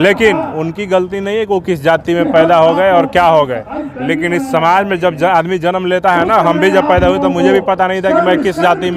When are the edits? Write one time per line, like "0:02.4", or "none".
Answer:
none